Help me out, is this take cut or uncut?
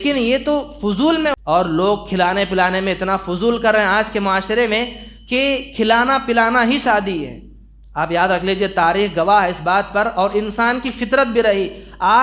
cut